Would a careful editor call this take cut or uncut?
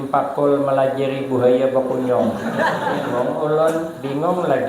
cut